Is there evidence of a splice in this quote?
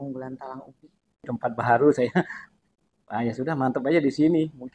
yes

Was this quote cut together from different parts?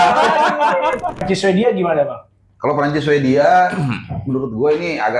yes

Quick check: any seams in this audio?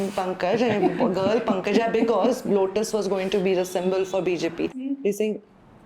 yes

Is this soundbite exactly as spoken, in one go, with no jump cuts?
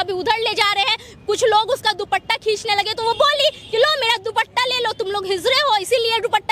yes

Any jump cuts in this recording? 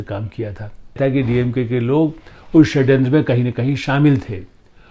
yes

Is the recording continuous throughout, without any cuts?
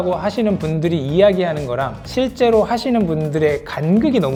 yes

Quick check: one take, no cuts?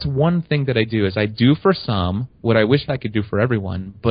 yes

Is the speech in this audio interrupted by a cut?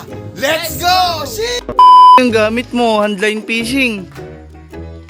yes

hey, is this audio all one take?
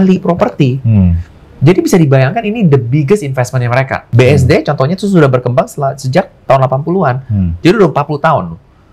no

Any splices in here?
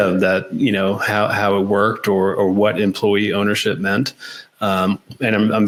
no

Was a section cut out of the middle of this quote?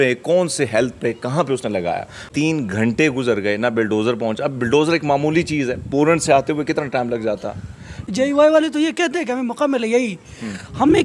yes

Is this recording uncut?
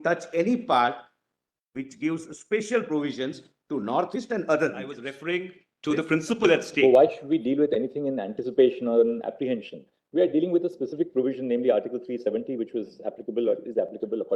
no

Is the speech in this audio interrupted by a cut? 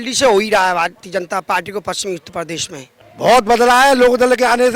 yes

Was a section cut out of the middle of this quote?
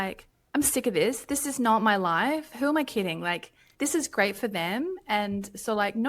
no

